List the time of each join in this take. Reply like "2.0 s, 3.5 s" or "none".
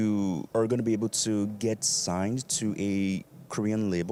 none